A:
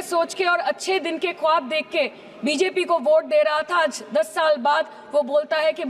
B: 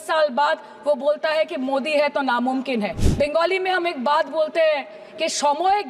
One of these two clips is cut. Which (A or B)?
B